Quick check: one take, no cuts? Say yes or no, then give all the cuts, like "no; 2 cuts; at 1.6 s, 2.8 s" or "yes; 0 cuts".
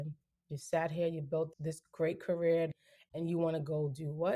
no; 2 cuts; at 1.6 s, 2.7 s